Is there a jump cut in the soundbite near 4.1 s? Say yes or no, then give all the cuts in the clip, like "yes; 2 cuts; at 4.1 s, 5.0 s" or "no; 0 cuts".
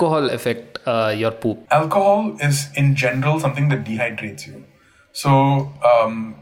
no; 1 cut; at 1.6 s